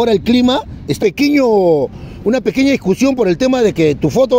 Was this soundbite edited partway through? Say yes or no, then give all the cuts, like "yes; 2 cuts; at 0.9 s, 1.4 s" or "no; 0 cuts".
yes; 1 cut; at 1.0 s